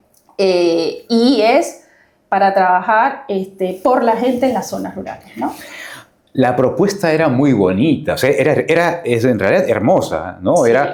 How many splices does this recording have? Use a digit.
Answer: 0